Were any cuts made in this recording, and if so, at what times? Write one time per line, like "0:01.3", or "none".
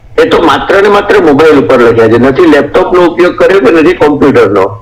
none